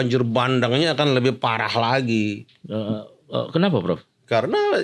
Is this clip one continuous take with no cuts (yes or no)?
yes